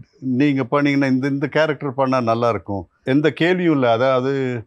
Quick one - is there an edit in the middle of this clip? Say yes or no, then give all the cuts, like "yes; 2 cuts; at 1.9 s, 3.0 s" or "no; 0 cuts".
yes; 1 cut; at 3.0 s